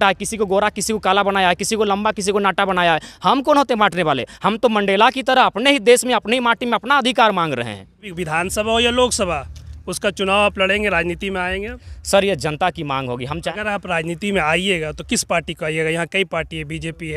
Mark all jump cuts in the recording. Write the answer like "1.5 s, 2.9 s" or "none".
8.2 s, 13.4 s